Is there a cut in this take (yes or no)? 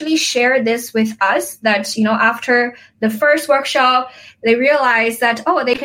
no